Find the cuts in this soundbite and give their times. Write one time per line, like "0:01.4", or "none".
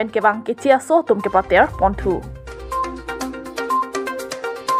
none